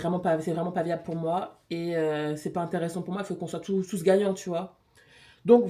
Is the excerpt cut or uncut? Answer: uncut